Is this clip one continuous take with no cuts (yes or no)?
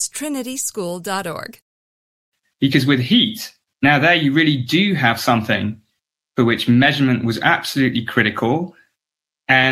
no